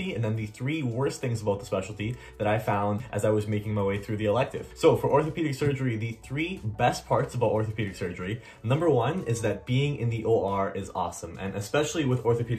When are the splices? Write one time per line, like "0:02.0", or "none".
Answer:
none

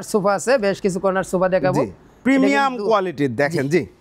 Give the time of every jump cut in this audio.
none

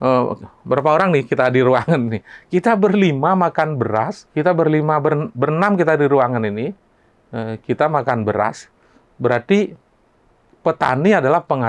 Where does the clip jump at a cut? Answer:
0:04.2

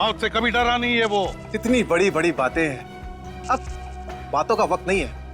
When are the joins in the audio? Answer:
0:01.4

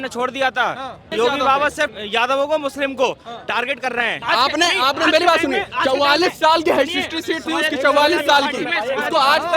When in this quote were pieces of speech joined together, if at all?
0:01.1
0:01.9
0:04.2

